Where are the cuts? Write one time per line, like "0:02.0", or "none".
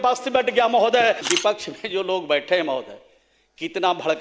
0:01.3